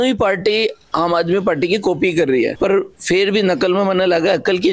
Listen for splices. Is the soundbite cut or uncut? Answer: cut